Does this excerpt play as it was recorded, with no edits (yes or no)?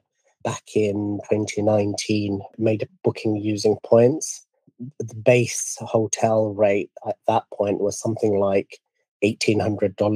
no